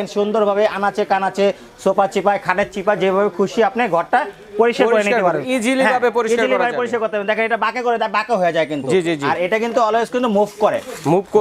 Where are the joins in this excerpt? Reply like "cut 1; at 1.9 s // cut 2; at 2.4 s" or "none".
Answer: none